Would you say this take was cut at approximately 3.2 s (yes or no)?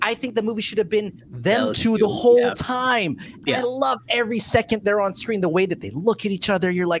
yes